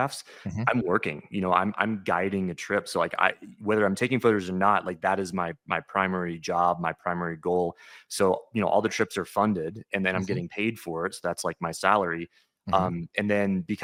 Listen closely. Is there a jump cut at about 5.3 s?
no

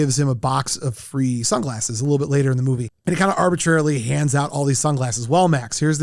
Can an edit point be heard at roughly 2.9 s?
yes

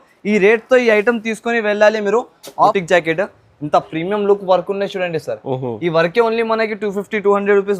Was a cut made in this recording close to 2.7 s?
yes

